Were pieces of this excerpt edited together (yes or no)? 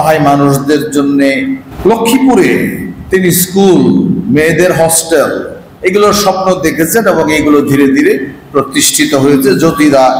yes